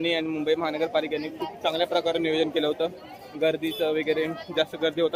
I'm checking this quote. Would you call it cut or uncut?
uncut